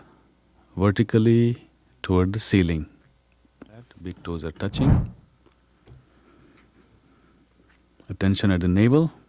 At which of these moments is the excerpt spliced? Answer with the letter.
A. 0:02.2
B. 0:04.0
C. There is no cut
B